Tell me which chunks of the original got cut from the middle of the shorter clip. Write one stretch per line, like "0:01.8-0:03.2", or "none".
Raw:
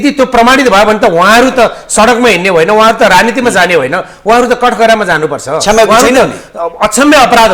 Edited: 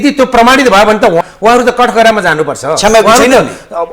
0:01.2-0:04.1